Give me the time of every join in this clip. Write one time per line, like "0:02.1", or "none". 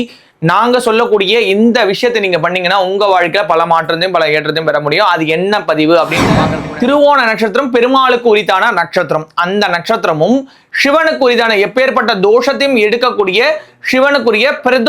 0:06.6